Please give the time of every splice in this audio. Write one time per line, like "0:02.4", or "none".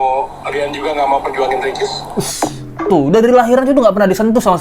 0:02.9

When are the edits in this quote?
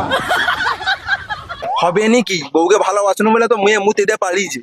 0:01.5

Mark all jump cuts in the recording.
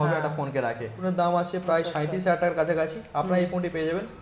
0:01.0

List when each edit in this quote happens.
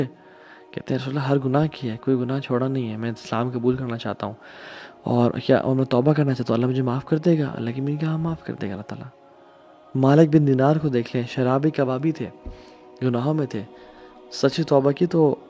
none

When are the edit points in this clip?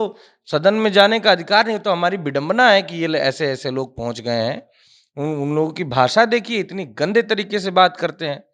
none

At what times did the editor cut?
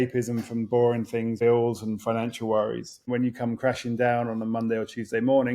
0:01.4
0:03.0

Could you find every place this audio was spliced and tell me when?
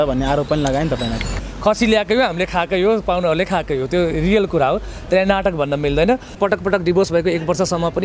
0:01.4
0:06.4

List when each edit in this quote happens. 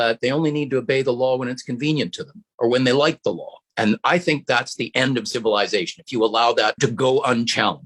0:06.8

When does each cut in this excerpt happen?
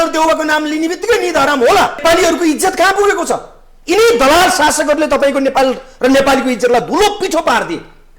0:02.0

